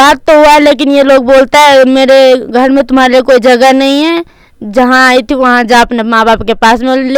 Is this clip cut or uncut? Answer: uncut